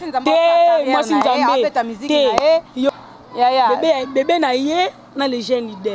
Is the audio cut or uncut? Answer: cut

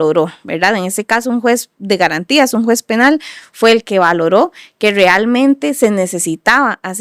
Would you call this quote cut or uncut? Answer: uncut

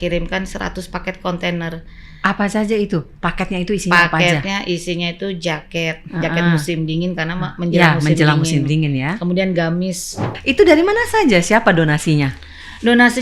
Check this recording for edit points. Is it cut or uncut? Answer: cut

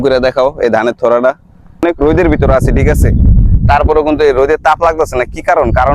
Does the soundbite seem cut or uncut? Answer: cut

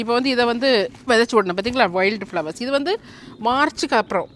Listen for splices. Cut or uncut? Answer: uncut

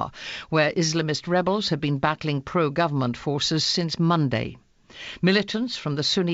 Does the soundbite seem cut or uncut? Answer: uncut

